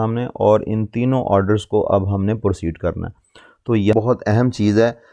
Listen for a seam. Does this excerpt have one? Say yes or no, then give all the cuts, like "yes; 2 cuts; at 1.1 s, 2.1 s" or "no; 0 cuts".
yes; 1 cut; at 3.9 s